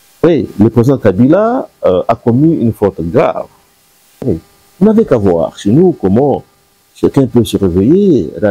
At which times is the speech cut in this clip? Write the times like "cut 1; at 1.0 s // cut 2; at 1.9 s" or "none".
cut 1; at 4.2 s